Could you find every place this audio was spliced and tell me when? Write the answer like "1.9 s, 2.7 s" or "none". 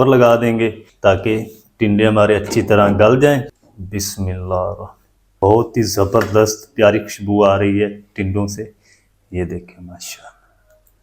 0.9 s, 3.5 s, 5.3 s